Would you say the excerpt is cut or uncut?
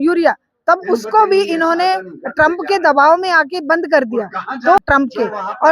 cut